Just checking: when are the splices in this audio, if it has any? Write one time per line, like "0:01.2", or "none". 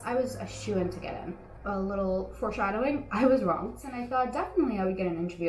0:01.5
0:03.8